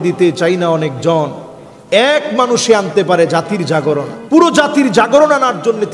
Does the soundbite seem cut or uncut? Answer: uncut